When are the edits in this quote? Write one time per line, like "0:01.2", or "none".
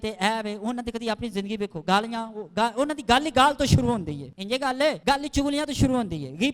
0:04.3
0:05.0